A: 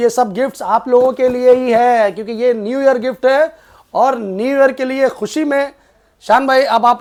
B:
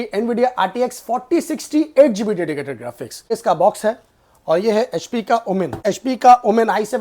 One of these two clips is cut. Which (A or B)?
B